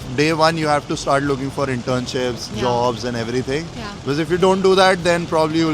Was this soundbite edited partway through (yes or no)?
no